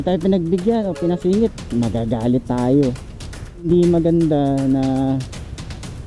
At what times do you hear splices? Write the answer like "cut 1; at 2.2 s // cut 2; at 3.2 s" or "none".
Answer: cut 1; at 3.7 s